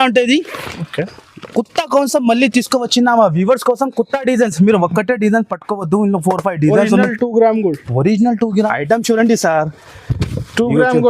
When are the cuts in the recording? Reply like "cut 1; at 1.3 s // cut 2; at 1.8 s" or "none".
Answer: cut 1; at 8.7 s

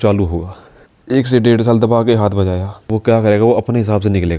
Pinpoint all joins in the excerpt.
cut 1; at 0.9 s // cut 2; at 2.9 s

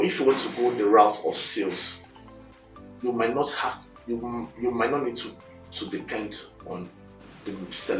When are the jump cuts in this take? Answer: none

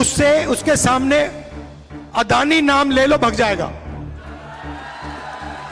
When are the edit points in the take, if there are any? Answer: none

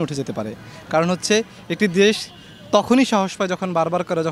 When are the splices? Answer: none

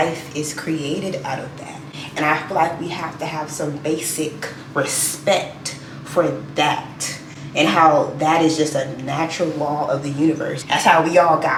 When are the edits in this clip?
none

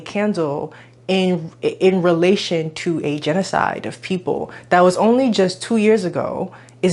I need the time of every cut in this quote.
none

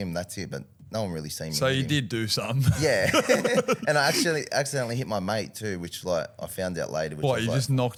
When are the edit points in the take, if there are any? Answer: none

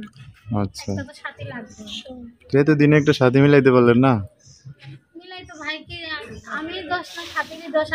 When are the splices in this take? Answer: none

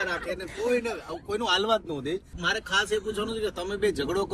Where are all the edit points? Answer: cut 1; at 2.4 s

